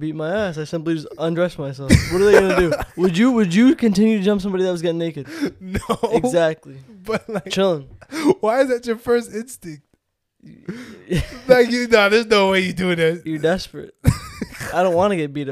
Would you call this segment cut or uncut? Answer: uncut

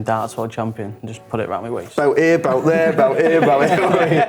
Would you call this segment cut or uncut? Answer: cut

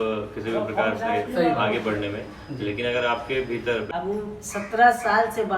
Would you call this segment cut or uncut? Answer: cut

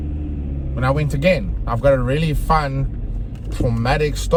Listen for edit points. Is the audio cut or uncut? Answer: uncut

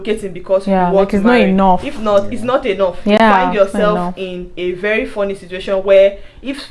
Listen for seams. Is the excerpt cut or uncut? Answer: uncut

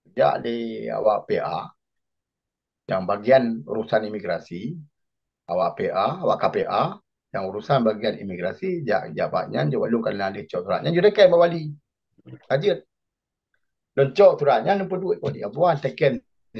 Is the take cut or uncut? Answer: uncut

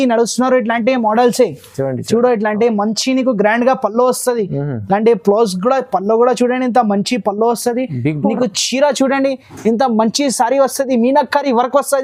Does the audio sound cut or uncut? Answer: uncut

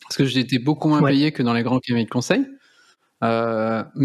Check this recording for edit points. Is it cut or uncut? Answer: uncut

